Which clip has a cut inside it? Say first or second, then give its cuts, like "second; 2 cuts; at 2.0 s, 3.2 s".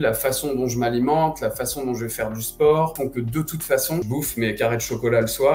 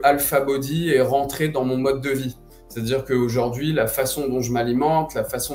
first; 2 cuts; at 2.9 s, 4.1 s